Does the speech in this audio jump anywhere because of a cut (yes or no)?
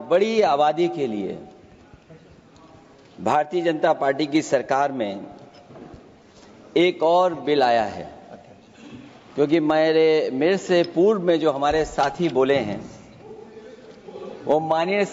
no